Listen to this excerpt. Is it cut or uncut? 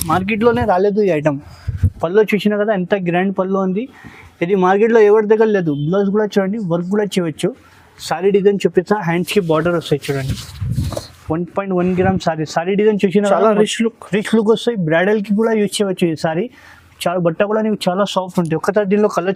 uncut